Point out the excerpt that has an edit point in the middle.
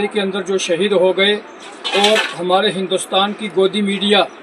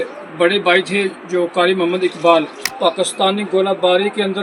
second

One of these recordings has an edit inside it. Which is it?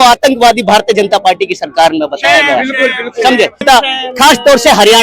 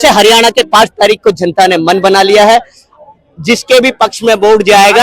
first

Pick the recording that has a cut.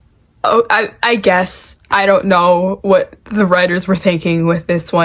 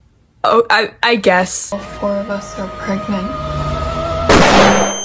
second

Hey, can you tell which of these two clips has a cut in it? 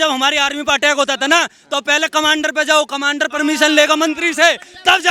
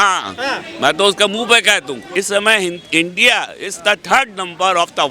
second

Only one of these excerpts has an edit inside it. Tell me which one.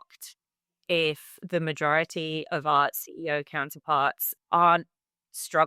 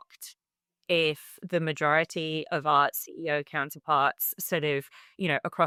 first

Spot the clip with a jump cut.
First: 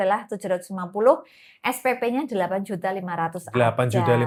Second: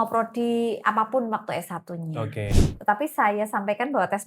second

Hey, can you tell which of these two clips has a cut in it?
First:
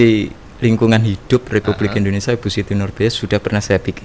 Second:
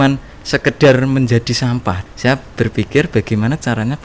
second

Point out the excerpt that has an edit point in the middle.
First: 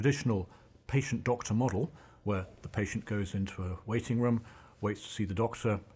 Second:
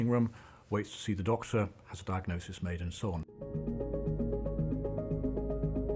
second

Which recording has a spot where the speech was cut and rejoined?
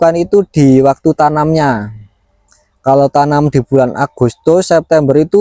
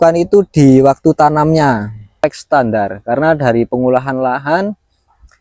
second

